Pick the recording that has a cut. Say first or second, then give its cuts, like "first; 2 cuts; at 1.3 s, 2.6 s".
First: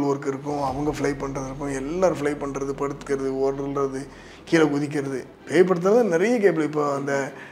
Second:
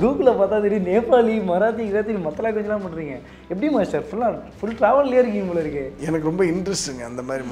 second; 1 cut; at 5.9 s